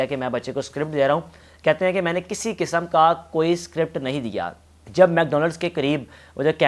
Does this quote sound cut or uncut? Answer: cut